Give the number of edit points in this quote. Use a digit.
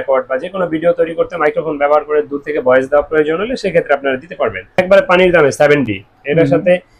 1